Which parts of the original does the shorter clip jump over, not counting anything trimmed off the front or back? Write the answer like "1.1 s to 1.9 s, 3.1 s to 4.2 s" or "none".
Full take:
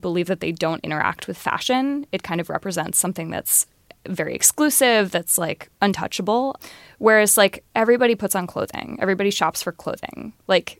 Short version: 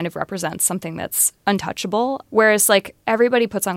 3.6 s to 5.6 s, 6.6 s to 6.9 s